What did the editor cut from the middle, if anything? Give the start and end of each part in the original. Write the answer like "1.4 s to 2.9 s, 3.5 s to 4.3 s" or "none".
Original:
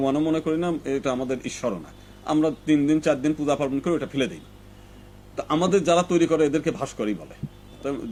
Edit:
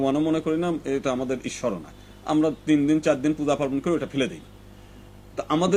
none